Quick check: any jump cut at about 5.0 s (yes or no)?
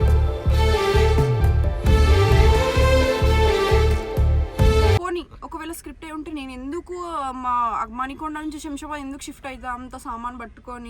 yes